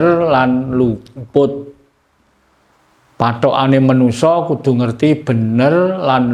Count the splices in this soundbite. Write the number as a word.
zero